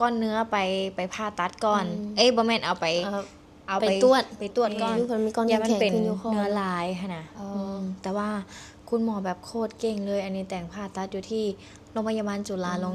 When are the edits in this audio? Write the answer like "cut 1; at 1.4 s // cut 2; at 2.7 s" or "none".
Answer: cut 1; at 4.8 s